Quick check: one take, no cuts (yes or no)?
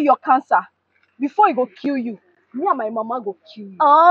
yes